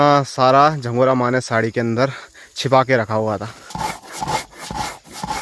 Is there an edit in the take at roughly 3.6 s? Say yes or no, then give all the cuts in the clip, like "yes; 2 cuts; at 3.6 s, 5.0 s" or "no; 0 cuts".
yes; 1 cut; at 3.6 s